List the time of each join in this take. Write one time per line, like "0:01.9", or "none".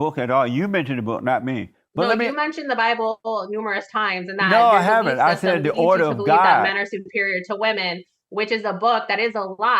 none